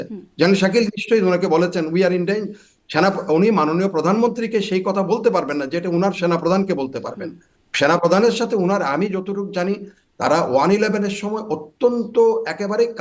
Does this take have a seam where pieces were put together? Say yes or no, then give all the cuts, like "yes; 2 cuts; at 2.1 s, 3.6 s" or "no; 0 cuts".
no; 0 cuts